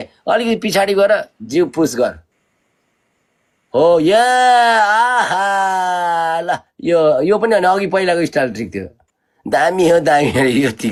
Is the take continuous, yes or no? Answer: yes